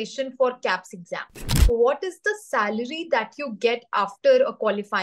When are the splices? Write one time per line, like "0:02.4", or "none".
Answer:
0:01.5